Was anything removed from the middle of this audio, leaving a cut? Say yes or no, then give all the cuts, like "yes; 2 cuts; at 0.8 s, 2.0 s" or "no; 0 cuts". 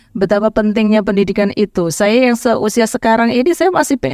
no; 0 cuts